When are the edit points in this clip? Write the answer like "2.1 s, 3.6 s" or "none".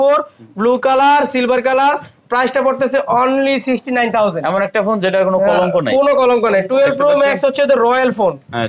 none

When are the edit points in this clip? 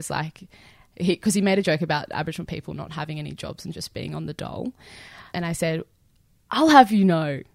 5.2 s

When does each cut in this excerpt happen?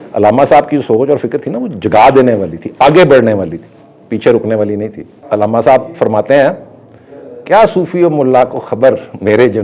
5.1 s

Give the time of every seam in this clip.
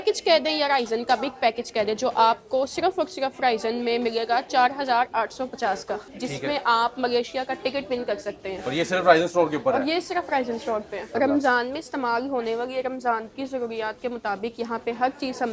6.1 s, 11.1 s

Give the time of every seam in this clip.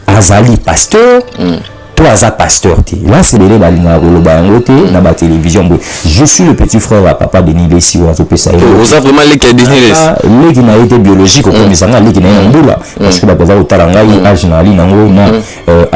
3.4 s

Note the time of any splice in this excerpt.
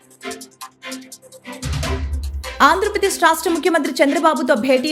2.5 s

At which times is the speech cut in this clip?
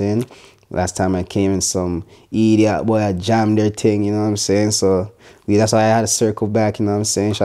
none

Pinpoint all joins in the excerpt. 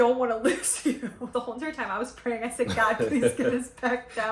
1.3 s

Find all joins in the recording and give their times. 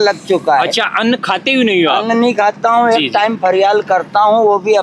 none

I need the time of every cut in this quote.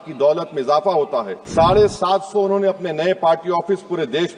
1.4 s

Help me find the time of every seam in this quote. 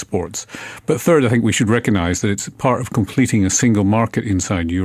none

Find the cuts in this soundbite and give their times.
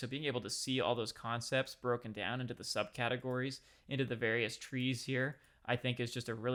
none

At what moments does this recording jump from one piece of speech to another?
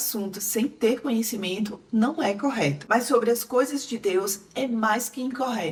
none

